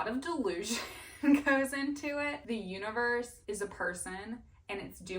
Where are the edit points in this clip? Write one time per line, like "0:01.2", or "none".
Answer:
0:02.4

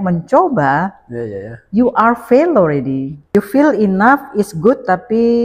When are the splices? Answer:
0:03.2

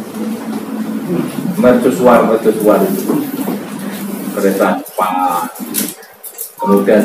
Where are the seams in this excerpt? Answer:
none

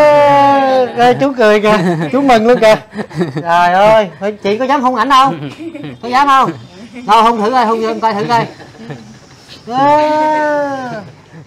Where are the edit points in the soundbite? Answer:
none

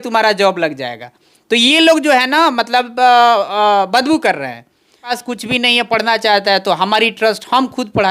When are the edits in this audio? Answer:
0:05.2

